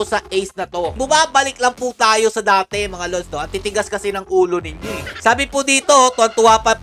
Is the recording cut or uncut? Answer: cut